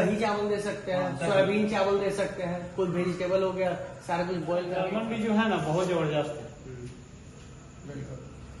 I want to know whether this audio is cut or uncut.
cut